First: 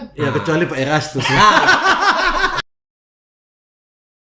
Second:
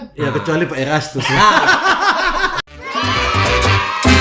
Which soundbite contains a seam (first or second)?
second